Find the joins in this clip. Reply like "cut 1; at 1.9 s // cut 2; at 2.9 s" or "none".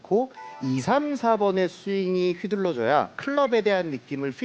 cut 1; at 3.2 s